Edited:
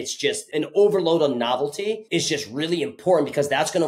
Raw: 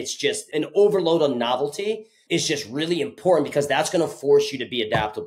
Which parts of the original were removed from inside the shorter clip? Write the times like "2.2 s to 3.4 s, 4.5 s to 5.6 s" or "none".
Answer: 2.0 s to 2.2 s

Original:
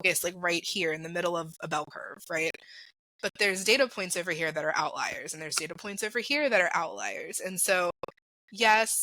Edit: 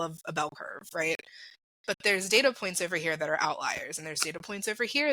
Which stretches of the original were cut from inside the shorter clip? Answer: none

